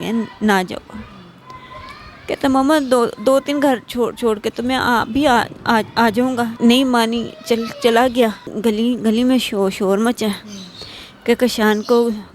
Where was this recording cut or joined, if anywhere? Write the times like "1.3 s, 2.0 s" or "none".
6.5 s, 8.5 s